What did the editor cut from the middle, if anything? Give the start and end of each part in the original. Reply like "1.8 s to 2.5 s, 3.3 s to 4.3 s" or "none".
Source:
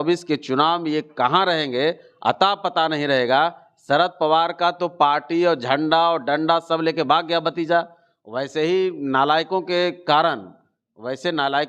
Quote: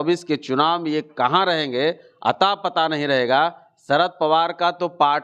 none